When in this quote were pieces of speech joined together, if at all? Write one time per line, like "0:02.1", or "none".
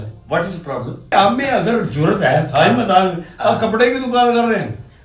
0:01.1